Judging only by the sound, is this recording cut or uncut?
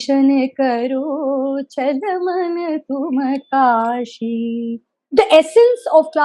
cut